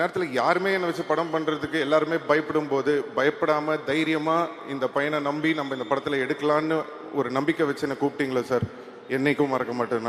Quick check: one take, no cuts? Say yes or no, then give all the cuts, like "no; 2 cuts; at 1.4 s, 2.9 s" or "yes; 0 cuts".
yes; 0 cuts